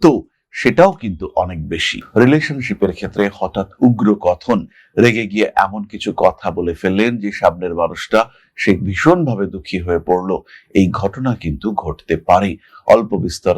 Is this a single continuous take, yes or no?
no